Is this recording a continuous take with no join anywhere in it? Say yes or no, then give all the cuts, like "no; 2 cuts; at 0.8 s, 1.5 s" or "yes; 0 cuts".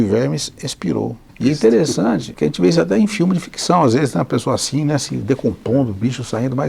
no; 2 cuts; at 1.2 s, 2.3 s